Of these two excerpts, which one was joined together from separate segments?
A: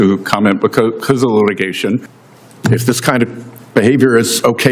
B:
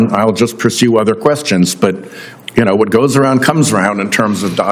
A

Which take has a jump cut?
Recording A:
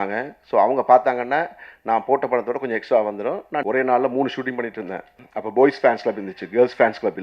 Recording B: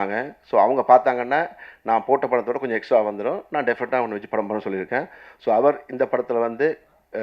A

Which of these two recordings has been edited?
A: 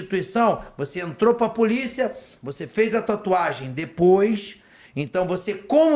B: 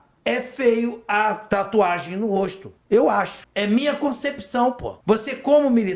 B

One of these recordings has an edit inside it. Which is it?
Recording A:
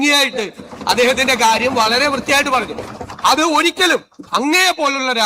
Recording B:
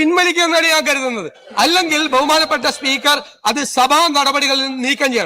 B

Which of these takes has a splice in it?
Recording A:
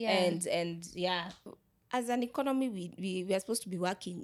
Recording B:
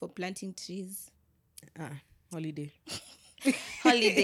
A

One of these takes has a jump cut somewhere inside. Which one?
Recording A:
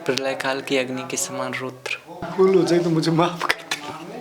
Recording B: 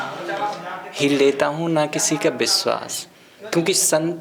A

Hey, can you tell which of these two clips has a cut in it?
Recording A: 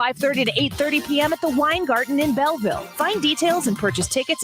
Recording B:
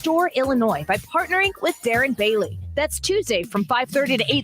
B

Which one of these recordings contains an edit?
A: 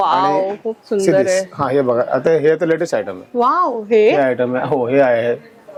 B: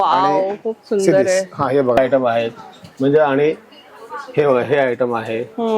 B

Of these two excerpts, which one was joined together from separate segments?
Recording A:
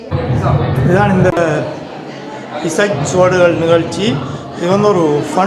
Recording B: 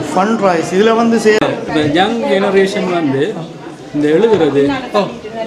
B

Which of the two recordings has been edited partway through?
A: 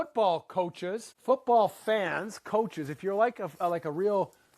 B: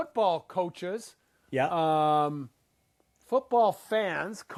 A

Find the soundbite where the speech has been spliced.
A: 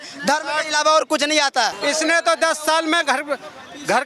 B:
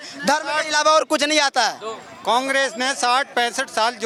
A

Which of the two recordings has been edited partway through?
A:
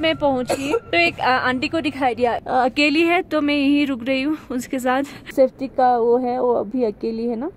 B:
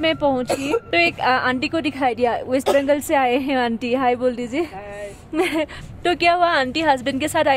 A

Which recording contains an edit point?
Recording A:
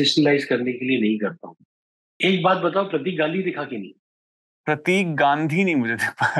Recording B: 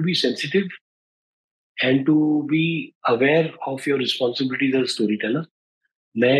A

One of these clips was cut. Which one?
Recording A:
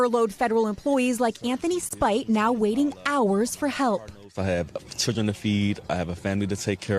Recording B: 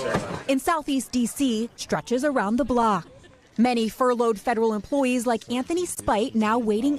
B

